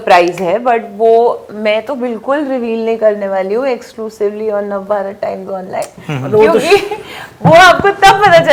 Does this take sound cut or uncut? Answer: uncut